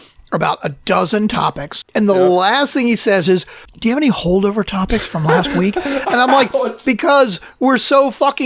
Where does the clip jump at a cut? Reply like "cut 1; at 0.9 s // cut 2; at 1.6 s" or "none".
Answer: cut 1; at 1.7 s